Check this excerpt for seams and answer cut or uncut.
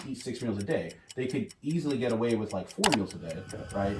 uncut